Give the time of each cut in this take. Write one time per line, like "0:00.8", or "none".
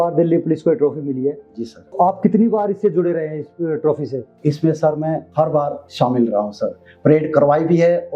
0:01.9
0:04.3
0:05.6

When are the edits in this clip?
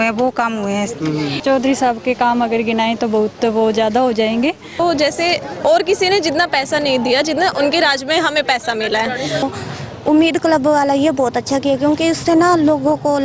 0:01.4
0:04.8
0:09.4

